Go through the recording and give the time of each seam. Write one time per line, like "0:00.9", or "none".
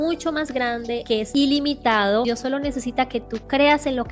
0:01.1
0:02.2